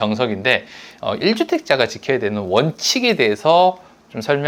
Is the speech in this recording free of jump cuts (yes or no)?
yes